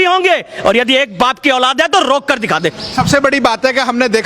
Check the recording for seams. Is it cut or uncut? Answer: uncut